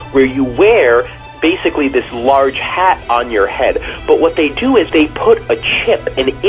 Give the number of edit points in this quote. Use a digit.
2